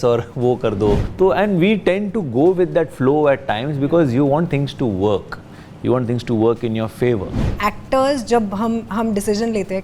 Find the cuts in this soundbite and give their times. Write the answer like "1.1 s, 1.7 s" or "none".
1.1 s, 7.5 s